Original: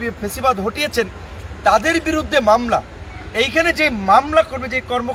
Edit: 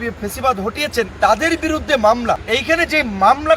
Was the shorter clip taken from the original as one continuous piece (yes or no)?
no